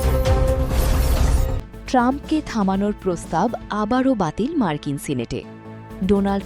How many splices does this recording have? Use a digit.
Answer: 1